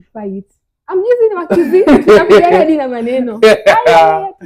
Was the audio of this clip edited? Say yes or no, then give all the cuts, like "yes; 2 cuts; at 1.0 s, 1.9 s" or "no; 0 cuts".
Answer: no; 0 cuts